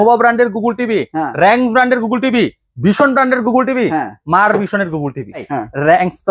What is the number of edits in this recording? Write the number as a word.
one